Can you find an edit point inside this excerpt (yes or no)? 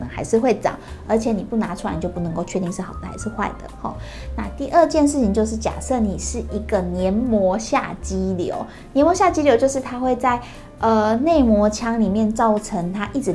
no